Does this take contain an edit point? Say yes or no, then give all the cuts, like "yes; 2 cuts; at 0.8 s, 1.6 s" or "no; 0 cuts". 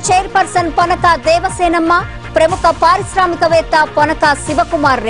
no; 0 cuts